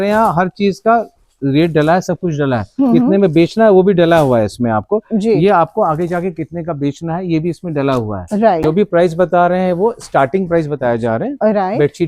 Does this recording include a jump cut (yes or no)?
yes